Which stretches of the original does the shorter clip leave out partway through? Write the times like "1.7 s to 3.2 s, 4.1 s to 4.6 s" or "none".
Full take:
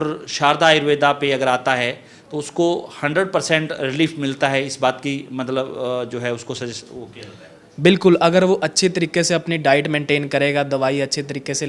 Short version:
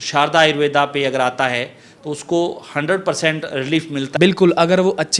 4.4 s to 7.8 s